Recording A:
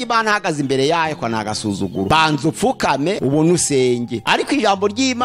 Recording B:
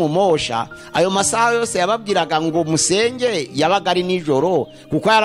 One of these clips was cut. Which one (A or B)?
A